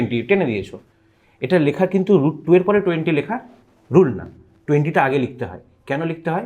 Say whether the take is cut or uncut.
uncut